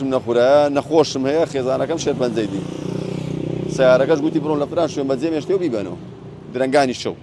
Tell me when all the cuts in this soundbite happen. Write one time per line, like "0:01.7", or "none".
none